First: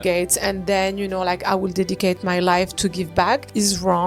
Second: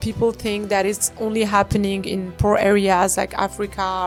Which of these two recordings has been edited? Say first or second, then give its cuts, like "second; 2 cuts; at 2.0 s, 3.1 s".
first; 1 cut; at 3.1 s